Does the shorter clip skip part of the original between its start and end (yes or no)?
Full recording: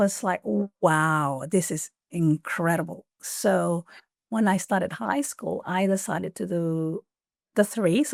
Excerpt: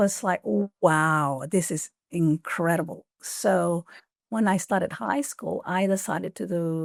no